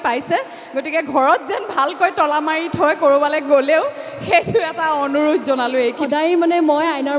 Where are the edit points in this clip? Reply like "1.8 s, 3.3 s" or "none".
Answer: 6.0 s